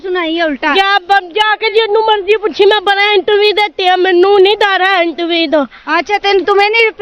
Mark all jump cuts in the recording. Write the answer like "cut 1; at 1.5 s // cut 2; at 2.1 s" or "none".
none